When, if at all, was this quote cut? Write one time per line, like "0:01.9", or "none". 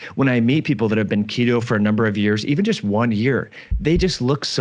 none